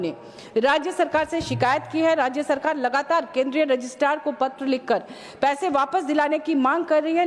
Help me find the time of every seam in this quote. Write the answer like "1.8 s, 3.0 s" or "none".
none